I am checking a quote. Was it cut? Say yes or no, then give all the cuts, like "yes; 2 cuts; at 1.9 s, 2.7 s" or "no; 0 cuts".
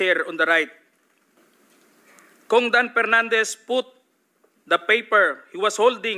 yes; 1 cut; at 1.4 s